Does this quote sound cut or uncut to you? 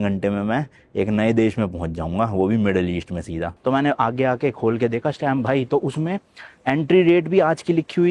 cut